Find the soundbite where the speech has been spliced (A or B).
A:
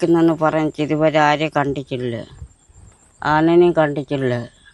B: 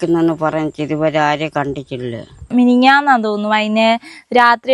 B